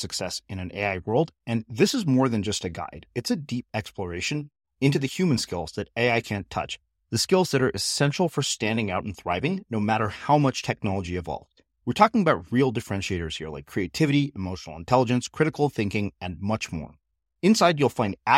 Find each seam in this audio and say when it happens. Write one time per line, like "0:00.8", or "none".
none